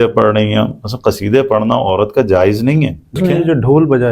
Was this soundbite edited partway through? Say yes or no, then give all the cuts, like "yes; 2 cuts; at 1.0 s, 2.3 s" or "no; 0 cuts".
yes; 1 cut; at 3.2 s